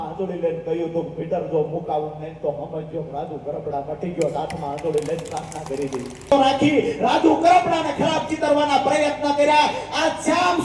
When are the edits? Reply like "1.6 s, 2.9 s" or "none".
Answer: 6.3 s